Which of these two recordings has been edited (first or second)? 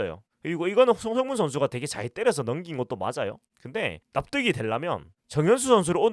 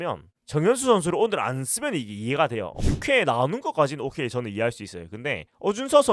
second